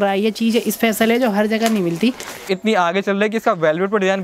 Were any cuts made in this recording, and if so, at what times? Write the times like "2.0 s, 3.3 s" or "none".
2.4 s